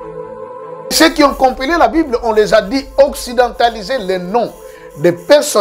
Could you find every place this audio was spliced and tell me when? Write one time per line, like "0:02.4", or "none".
0:00.9